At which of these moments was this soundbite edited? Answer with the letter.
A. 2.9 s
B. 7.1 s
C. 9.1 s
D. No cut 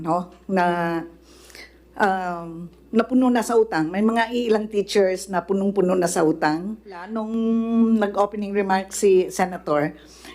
B